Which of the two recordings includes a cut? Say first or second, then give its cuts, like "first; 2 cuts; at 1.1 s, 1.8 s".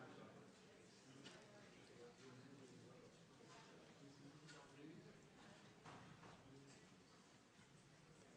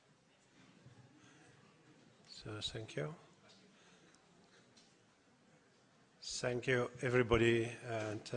second; 1 cut; at 4.9 s